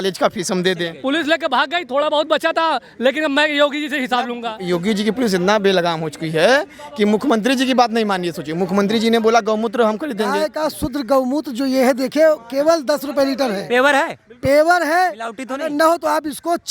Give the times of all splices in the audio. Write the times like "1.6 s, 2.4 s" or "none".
0.9 s, 4.5 s, 10.4 s